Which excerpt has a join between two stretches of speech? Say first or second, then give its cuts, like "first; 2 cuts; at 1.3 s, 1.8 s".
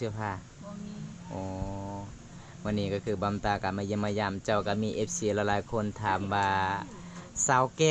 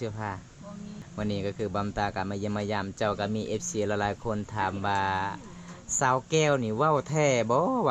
second; 1 cut; at 1.0 s